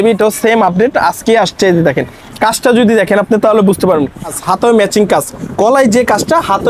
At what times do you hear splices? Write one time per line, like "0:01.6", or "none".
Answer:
0:04.4